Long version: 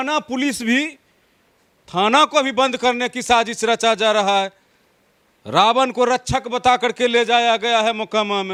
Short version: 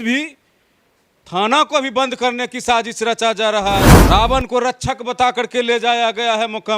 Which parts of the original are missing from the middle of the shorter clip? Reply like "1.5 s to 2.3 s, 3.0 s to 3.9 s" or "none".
4.6 s to 5.4 s